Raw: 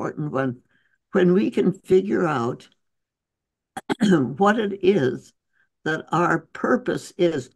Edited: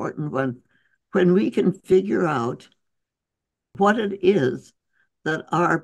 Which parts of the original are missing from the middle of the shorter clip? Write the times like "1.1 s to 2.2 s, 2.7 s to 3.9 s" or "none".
3.7 s to 4.3 s